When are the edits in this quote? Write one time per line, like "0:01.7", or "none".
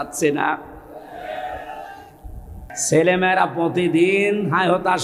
0:02.6